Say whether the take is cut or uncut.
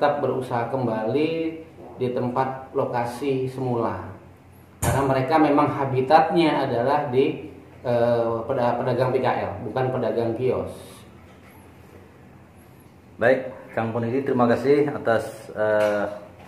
uncut